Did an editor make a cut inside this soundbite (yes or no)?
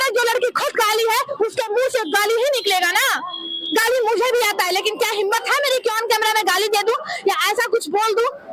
no